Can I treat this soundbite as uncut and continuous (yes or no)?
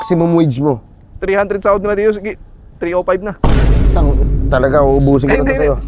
yes